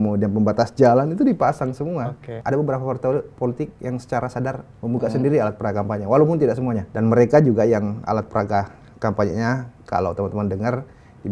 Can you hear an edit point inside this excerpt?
yes; 2 cuts; at 2.3 s, 6.9 s

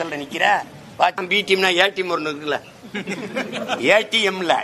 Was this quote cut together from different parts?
yes; 1 cut; at 1.2 s

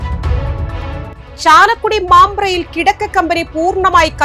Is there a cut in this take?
no; 0 cuts

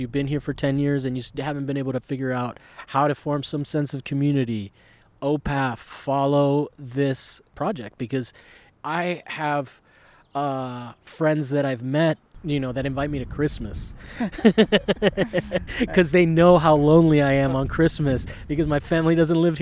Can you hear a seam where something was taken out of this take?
yes; 3 cuts; at 7.5 s, 8.6 s, 12.3 s

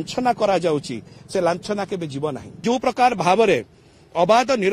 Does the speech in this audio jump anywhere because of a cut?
yes; 1 cut; at 2.6 s

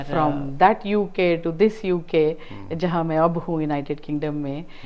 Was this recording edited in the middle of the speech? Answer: no; 0 cuts

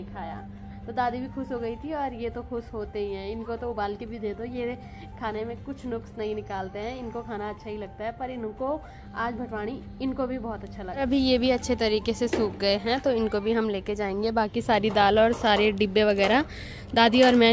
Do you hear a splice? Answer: no; 0 cuts

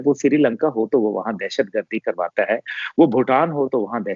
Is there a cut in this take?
no; 0 cuts

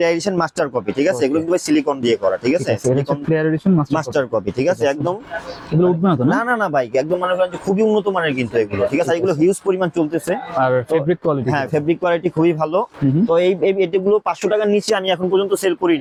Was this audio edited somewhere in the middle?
no; 0 cuts

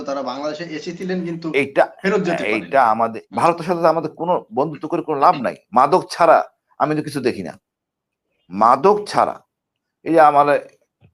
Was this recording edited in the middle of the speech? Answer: yes; 1 cut; at 3.2 s

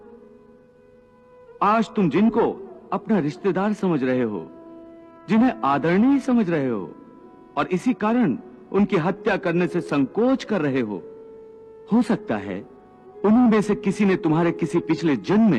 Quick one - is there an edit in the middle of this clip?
no; 0 cuts

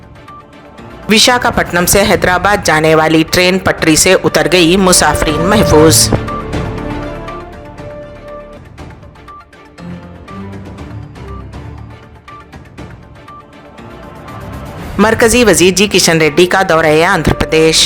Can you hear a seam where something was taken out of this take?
no; 0 cuts

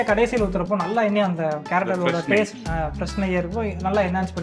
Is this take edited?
no; 0 cuts

